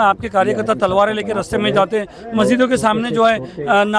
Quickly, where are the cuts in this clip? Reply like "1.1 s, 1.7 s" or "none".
none